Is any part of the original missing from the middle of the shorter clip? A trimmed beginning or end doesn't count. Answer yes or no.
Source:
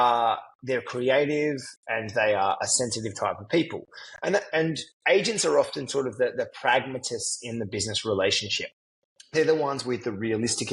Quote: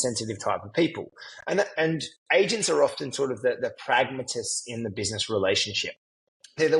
no